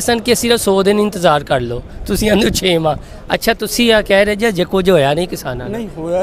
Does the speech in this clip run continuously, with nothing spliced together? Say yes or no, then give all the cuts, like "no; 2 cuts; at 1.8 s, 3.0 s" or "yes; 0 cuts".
yes; 0 cuts